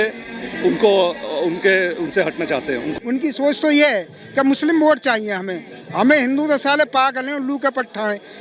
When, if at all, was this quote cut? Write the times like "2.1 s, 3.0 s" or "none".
2.9 s